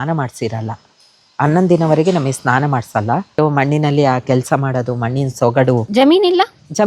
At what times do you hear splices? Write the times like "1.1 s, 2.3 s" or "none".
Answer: 3.3 s, 5.9 s